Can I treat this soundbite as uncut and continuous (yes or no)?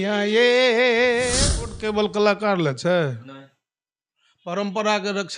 no